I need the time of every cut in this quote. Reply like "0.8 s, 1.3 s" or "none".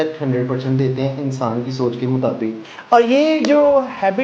2.7 s